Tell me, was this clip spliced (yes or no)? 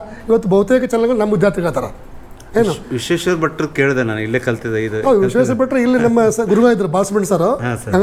no